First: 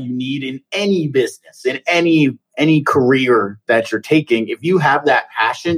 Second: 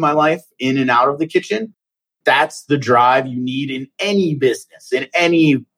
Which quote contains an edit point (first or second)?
second